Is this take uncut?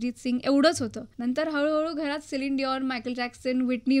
no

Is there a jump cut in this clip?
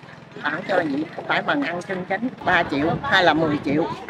yes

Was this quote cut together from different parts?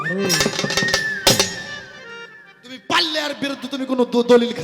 no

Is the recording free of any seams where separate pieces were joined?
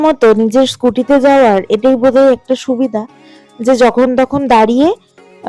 yes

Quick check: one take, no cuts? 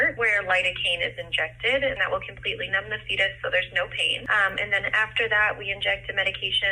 yes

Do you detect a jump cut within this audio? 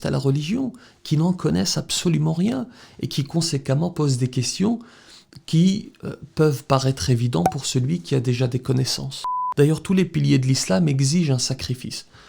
yes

